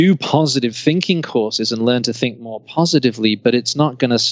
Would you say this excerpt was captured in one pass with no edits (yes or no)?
yes